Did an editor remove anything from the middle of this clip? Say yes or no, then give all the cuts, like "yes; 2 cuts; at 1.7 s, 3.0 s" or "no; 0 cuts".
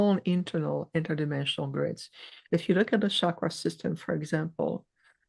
no; 0 cuts